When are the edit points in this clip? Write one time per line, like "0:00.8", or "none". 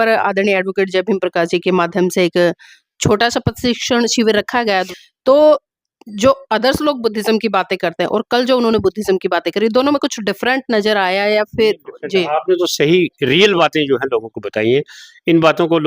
0:04.9